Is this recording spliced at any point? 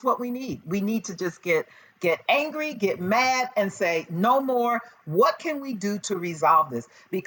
no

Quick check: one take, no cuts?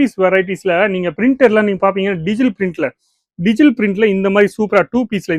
yes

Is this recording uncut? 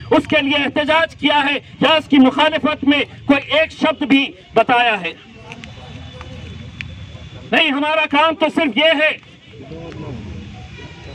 yes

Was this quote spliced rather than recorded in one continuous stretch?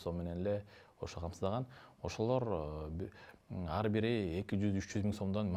no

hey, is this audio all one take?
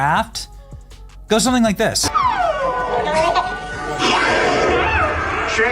no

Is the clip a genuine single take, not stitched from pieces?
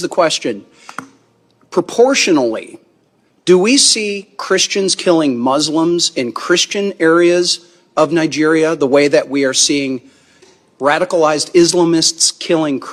yes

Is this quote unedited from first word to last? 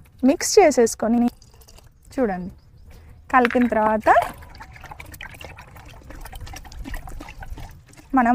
no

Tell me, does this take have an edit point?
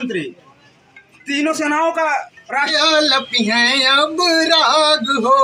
yes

